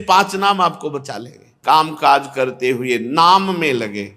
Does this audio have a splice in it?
yes; 1 cut; at 1.5 s

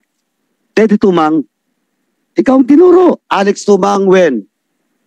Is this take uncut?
no; 1 cut; at 3.3 s

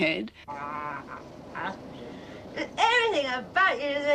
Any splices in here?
no; 0 cuts

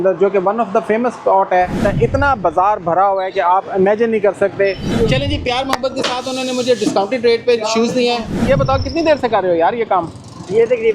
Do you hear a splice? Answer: yes; 3 cuts; at 1.8 s, 4.9 s, 8.3 s

